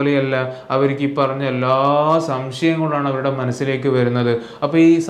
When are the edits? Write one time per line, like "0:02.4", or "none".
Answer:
none